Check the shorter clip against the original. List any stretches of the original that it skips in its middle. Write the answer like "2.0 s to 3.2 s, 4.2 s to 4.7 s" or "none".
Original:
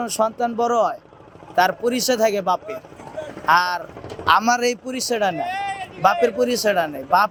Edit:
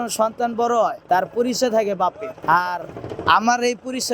1.0 s to 1.4 s, 2.8 s to 3.3 s